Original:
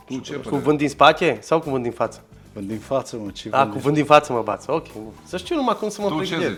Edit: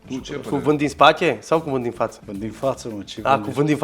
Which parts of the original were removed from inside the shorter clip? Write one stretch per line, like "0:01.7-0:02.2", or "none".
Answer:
0:02.2-0:02.5